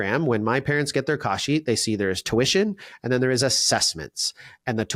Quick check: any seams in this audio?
no; 0 cuts

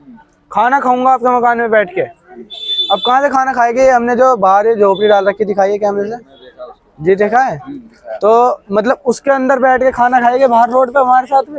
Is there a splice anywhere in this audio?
no; 0 cuts

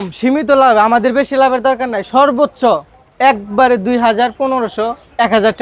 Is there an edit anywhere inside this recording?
no; 0 cuts

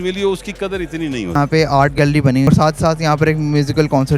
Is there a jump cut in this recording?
yes; 2 cuts; at 1.3 s, 2.5 s

